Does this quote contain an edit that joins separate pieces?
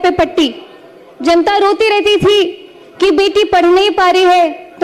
no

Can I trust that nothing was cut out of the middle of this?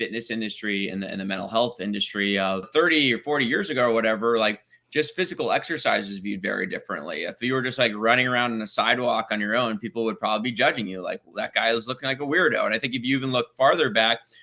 no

